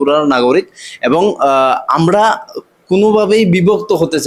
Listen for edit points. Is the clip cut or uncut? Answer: uncut